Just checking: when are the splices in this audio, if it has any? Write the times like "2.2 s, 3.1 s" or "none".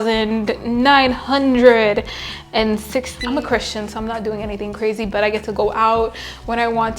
3.2 s